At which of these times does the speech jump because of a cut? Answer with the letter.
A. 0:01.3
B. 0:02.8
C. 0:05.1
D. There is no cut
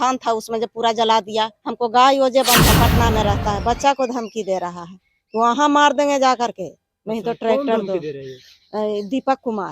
B